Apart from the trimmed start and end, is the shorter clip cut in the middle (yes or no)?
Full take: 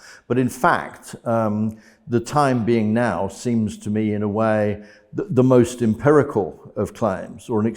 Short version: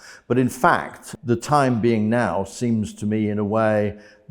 yes